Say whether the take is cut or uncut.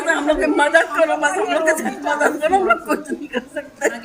uncut